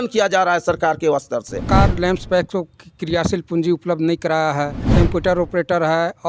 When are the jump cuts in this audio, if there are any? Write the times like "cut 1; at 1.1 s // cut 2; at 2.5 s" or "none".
cut 1; at 1.7 s // cut 2; at 4.8 s